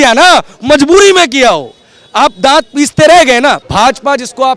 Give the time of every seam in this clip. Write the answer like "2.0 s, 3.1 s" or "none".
3.6 s